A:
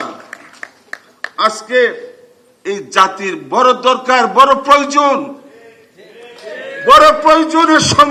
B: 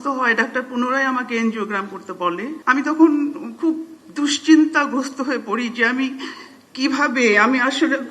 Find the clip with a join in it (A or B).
B